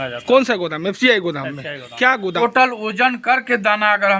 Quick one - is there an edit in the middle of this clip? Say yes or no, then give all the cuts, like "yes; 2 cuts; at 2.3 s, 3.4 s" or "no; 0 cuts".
yes; 1 cut; at 2.3 s